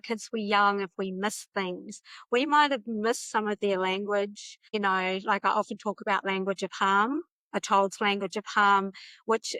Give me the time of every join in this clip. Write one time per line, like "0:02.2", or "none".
none